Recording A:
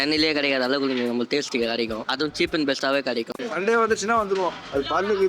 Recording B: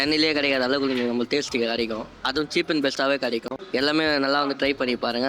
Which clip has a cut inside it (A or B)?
A